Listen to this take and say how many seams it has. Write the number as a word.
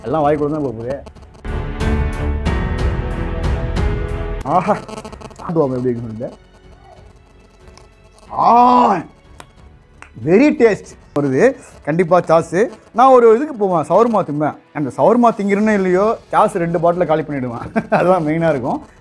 two